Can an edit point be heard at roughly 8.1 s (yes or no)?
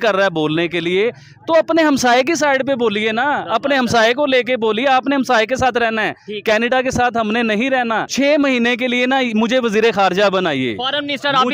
yes